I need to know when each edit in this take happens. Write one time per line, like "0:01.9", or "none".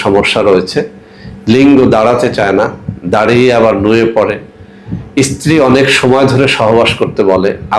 none